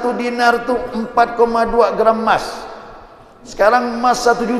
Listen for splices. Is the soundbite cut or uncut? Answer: uncut